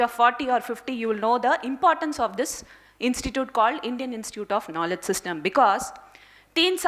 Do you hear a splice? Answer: no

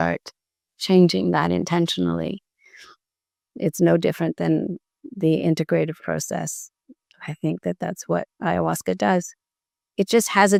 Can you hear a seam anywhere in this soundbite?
no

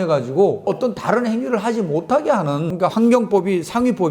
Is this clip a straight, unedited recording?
no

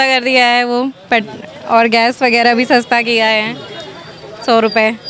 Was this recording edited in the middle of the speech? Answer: no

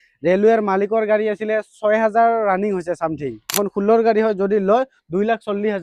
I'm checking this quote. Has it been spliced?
yes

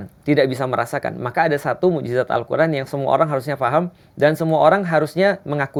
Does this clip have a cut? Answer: no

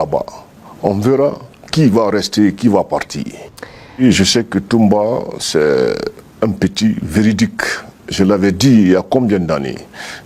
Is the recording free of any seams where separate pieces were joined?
no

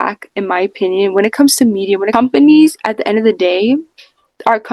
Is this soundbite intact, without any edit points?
no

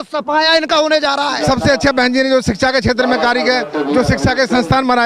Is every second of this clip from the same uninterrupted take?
no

